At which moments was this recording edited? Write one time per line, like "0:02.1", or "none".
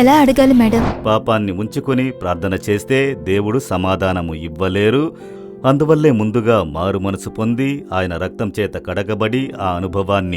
0:00.9

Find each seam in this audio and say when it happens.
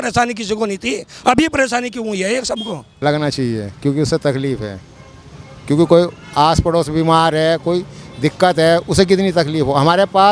0:02.8

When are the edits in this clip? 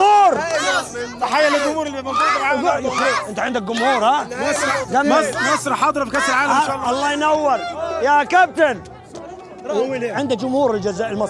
none

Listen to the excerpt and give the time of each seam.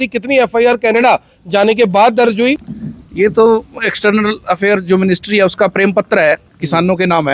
0:02.6
0:05.7

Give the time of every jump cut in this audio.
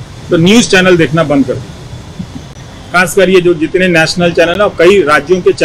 none

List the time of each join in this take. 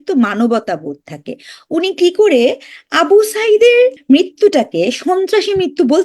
0:04.0

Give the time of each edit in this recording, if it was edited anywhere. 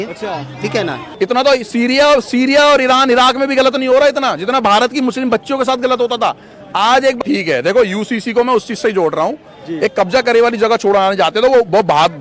0:01.0
0:07.2

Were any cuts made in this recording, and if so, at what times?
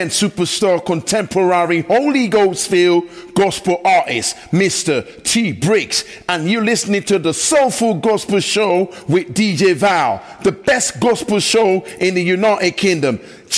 none

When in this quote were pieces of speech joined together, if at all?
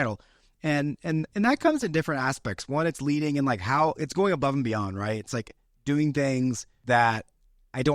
0:06.7

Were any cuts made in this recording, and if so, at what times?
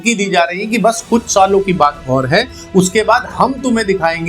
none

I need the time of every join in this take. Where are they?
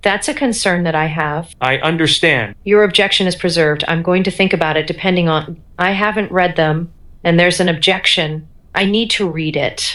none

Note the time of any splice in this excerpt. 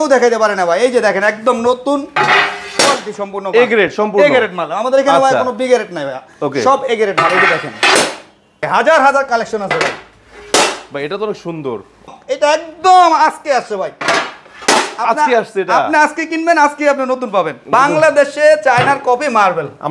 0:08.7
0:12.1
0:17.7

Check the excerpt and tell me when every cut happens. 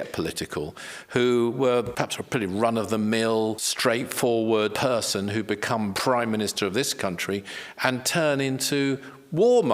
0:01.9
0:03.7
0:04.7
0:06.0

